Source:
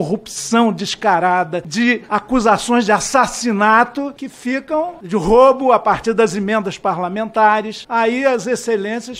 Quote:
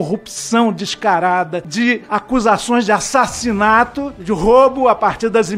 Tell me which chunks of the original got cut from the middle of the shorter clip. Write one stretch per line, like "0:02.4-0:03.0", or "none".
0:04.2-0:05.0